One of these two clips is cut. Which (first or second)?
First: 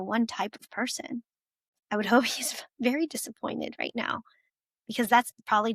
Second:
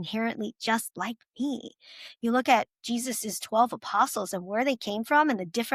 first